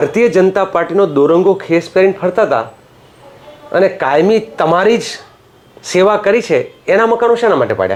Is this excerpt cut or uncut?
uncut